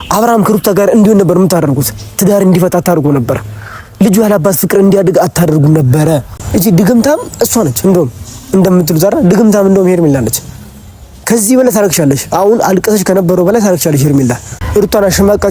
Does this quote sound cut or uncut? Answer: cut